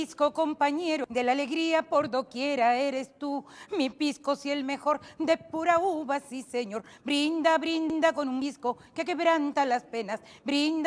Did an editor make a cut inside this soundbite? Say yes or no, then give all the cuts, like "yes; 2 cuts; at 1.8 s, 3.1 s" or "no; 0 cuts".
yes; 1 cut; at 1.1 s